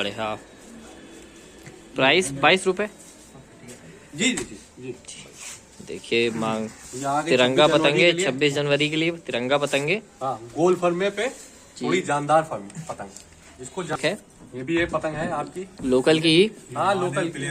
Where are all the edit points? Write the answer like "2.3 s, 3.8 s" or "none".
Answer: 14.0 s